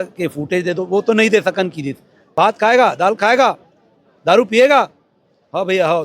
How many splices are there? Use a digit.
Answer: 1